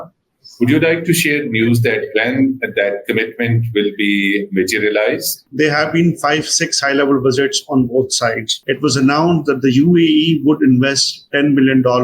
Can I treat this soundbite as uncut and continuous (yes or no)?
no